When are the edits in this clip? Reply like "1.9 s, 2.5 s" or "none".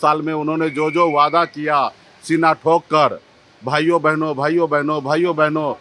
none